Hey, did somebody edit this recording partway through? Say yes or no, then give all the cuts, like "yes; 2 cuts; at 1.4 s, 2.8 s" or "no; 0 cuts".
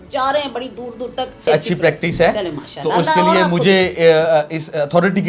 yes; 1 cut; at 1.4 s